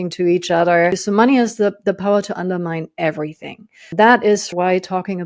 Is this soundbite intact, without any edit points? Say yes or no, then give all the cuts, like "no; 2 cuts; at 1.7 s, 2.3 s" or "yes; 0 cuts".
no; 3 cuts; at 1.0 s, 3.9 s, 4.5 s